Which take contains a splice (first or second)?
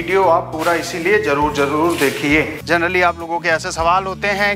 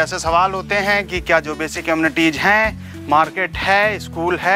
first